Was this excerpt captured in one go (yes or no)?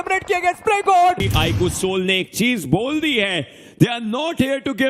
no